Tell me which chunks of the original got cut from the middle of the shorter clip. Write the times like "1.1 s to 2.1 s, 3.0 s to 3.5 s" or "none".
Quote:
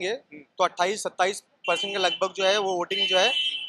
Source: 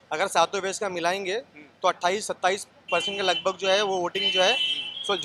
none